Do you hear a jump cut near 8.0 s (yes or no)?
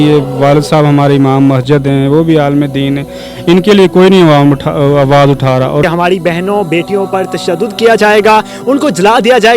no